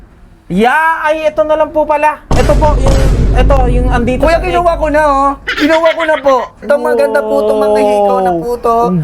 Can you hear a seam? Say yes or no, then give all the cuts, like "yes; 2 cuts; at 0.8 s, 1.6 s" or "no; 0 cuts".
yes; 1 cut; at 6.7 s